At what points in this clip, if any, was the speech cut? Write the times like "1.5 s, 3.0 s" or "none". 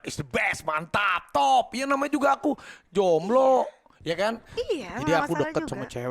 none